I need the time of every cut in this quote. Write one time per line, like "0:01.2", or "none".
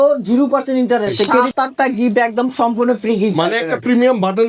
0:01.5